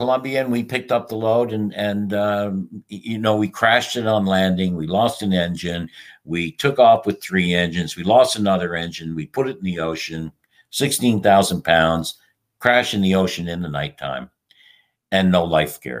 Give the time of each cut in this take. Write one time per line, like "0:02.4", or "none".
none